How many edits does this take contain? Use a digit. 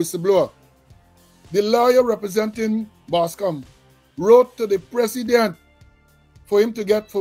0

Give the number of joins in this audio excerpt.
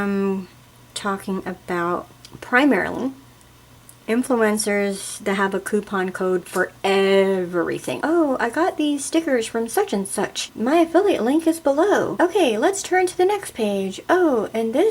3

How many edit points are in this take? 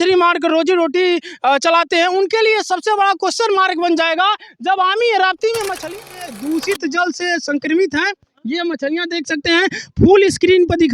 1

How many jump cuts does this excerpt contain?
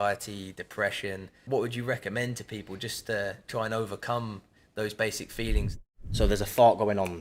2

